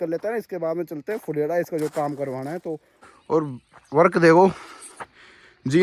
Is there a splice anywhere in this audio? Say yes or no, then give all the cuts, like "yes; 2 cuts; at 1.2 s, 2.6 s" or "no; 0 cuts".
yes; 1 cut; at 2.9 s